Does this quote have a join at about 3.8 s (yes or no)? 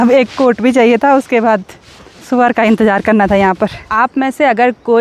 yes